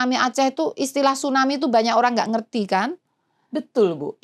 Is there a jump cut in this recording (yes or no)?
no